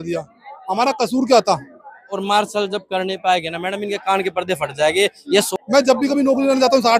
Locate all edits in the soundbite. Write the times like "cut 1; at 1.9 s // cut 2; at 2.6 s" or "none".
cut 1; at 2.2 s // cut 2; at 5.5 s